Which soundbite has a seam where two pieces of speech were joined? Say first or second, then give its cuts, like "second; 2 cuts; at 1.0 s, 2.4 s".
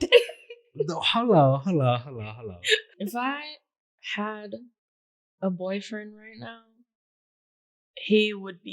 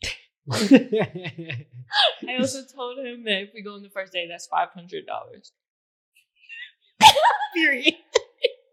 first; 1 cut; at 2.9 s